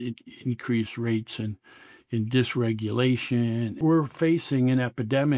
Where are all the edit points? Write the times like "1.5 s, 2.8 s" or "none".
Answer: 3.8 s